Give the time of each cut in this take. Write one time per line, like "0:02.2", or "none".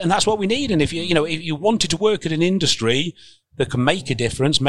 none

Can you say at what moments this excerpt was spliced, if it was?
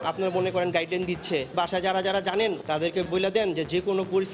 0:01.5
0:03.0

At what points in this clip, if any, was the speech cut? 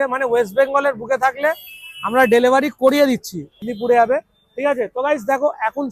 0:03.5

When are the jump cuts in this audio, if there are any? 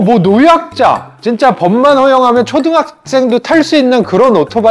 none

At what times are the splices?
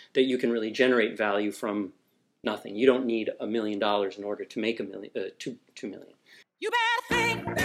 0:06.7

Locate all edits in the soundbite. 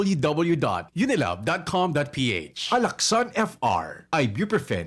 0:02.5

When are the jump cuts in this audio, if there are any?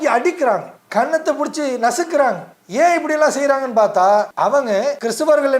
0:04.6

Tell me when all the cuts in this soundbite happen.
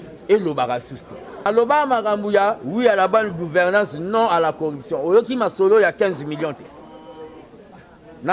0:01.5

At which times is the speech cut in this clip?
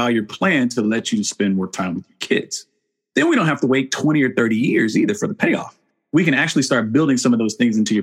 0:05.8

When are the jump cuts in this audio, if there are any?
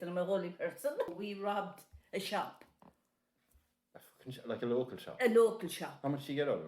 0:01.1

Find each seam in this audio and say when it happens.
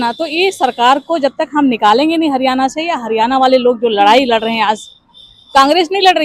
none

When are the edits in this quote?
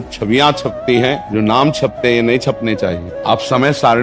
0:01.2
0:03.1

